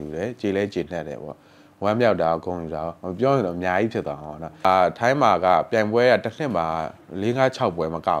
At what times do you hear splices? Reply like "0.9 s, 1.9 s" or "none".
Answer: 4.6 s